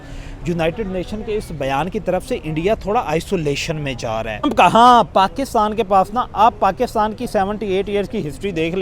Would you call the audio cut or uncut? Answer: cut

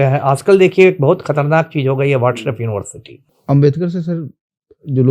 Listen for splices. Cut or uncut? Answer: cut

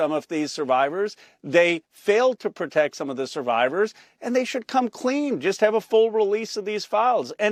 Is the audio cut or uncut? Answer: uncut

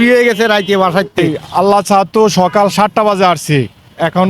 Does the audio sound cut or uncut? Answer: cut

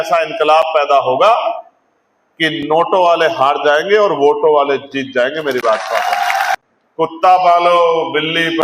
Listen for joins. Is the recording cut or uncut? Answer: cut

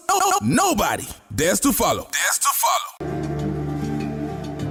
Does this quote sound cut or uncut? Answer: uncut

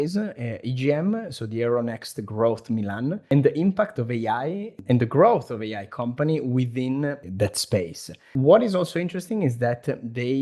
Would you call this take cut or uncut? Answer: cut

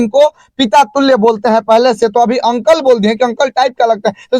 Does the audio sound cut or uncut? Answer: uncut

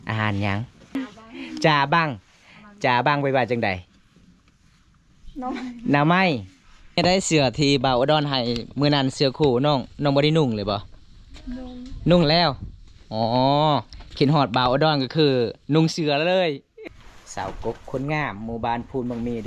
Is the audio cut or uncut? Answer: cut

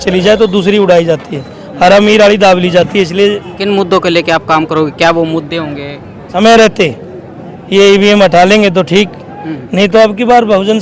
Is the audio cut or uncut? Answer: cut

